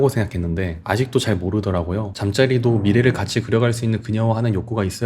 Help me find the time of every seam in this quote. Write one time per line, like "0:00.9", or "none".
0:02.1